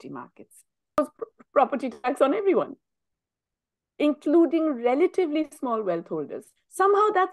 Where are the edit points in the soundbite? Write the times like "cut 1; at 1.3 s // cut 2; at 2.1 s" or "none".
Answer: cut 1; at 1.0 s